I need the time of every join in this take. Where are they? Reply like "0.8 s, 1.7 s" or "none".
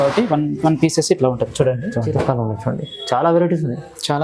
2.1 s